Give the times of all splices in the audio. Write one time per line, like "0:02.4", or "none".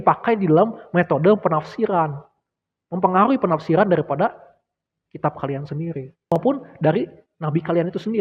0:06.4